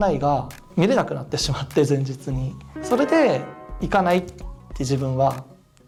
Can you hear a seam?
no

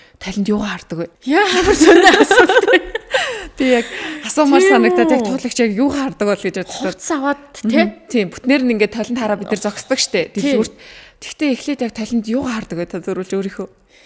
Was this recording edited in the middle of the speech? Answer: yes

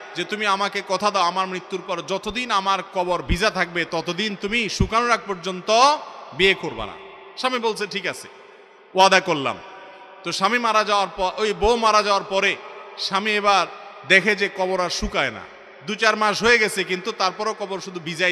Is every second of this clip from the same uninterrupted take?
yes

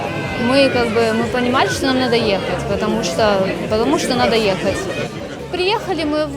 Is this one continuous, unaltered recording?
yes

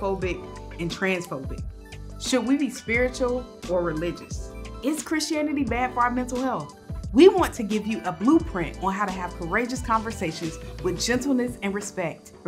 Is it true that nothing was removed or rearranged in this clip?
yes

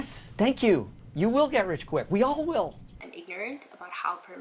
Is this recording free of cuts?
no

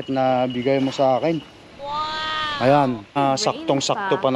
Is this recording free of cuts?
no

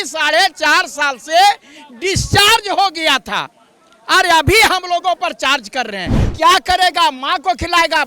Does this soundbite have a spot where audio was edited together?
yes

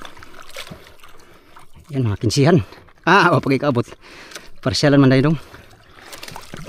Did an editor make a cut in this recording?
no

